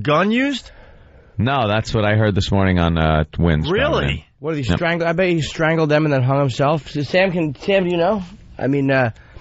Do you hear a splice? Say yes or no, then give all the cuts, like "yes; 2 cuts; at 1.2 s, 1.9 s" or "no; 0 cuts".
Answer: yes; 1 cut; at 7.6 s